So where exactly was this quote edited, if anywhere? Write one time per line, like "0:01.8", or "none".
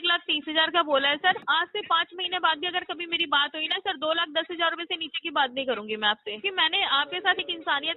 0:01.4
0:06.4